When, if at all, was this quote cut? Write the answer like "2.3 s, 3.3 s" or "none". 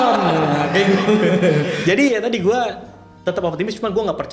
none